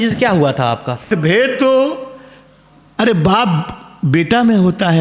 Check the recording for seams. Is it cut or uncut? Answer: cut